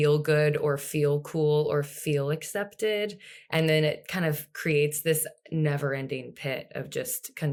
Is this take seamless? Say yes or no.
yes